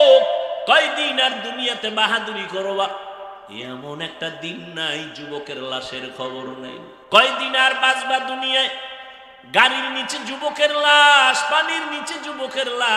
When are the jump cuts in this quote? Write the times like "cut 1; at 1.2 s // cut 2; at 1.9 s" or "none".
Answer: cut 1; at 6.9 s